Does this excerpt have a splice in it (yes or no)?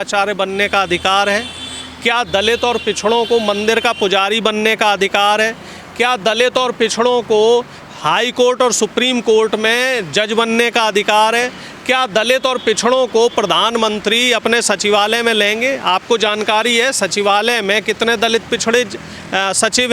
no